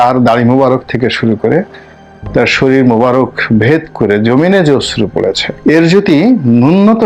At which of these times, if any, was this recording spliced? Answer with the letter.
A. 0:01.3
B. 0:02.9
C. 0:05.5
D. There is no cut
C